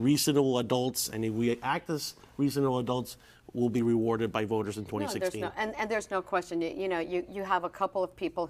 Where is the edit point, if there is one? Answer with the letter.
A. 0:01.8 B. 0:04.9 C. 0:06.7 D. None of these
D